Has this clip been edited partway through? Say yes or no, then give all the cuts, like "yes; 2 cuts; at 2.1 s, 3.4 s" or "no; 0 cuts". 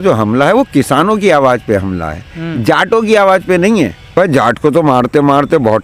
yes; 1 cut; at 4.0 s